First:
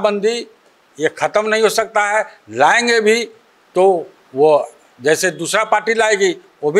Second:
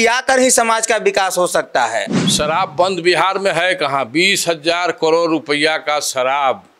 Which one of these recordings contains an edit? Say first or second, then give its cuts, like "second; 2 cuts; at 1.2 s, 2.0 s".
second; 1 cut; at 2.2 s